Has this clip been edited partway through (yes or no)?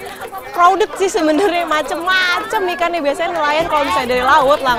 no